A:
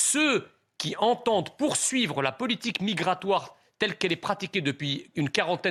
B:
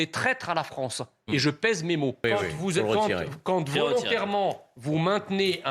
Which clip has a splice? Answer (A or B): B